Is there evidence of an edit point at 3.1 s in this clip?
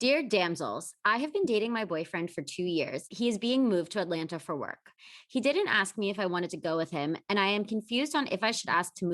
yes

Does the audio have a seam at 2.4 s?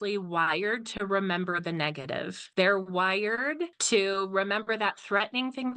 yes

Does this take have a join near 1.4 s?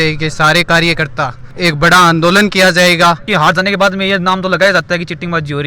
yes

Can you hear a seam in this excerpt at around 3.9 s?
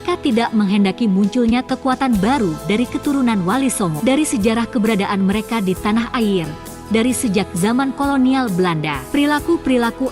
yes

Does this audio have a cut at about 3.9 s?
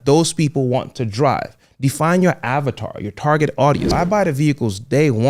yes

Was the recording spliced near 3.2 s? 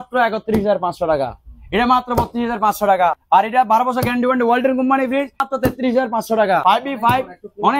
yes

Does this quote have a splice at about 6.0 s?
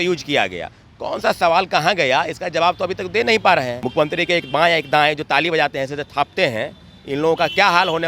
no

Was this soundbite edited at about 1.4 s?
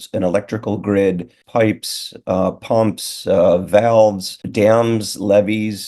yes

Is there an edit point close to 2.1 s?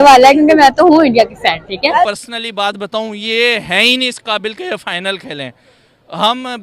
yes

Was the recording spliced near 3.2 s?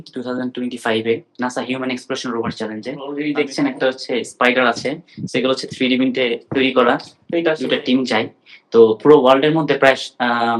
yes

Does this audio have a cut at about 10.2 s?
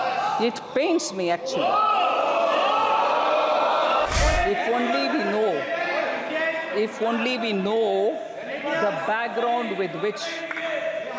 no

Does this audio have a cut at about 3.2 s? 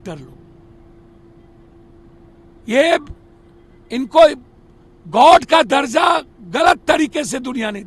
no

